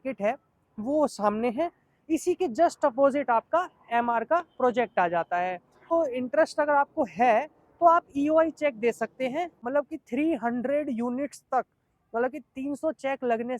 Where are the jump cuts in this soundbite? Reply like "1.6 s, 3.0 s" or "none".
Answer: 5.9 s, 9.6 s